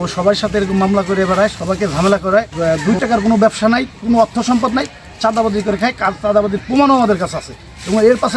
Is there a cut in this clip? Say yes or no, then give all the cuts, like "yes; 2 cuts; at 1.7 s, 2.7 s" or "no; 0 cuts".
yes; 1 cut; at 2.5 s